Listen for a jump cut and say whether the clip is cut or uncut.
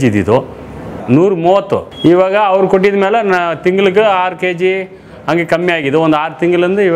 cut